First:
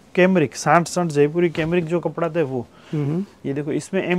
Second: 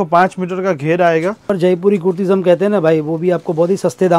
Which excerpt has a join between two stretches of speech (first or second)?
second